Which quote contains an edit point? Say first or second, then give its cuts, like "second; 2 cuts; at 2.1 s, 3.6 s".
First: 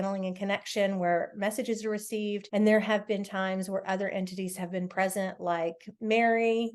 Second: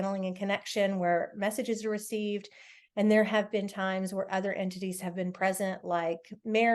first; 1 cut; at 2.4 s